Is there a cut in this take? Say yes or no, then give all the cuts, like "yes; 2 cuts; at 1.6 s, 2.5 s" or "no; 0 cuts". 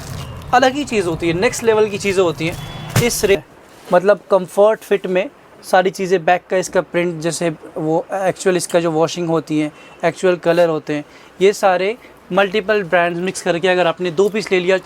yes; 1 cut; at 3.4 s